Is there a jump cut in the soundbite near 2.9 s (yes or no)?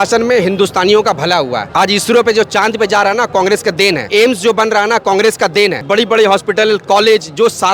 no